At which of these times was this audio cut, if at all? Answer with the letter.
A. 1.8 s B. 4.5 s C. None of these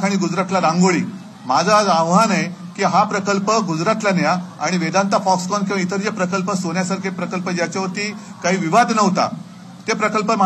C